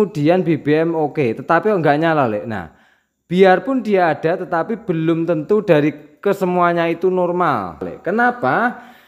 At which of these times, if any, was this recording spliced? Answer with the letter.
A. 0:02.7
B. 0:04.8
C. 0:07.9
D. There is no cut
C